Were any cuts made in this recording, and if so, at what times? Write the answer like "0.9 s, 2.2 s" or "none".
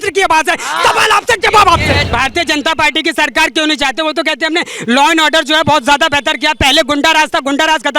2.0 s